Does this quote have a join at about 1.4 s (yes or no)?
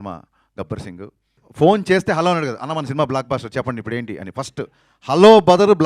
yes